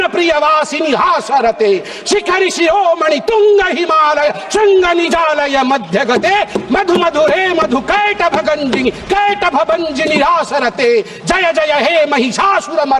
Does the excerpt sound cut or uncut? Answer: uncut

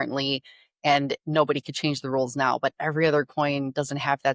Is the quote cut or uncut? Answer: uncut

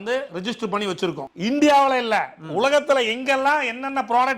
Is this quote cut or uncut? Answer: cut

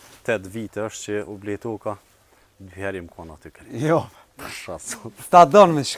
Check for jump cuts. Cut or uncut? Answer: uncut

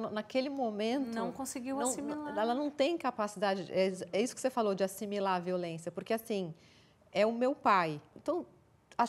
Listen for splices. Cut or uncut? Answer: cut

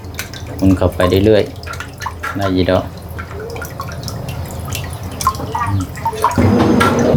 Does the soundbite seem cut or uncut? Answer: uncut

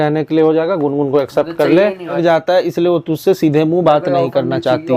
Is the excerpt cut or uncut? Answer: cut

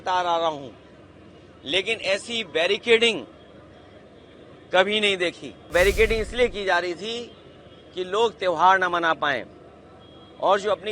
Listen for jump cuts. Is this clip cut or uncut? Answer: cut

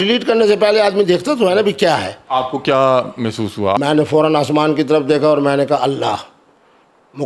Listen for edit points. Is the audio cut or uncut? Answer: cut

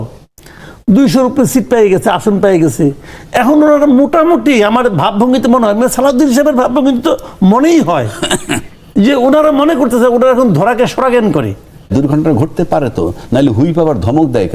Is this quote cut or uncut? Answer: cut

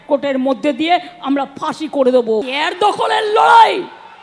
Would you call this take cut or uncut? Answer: cut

